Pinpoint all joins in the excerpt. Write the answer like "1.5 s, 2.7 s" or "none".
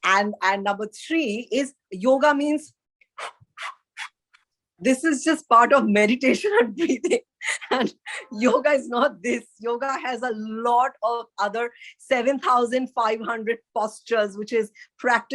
1.8 s